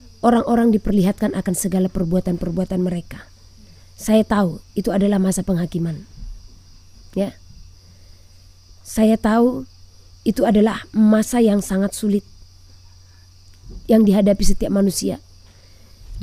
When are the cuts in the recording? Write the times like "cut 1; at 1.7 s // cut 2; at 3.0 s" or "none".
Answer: none